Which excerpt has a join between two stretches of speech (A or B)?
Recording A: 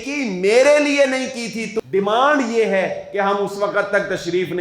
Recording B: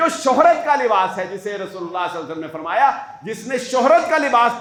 A